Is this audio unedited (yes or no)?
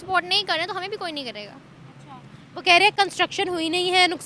yes